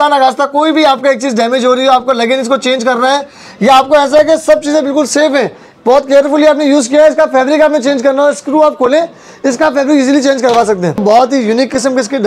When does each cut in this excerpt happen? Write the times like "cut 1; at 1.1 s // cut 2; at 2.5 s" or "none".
cut 1; at 11.0 s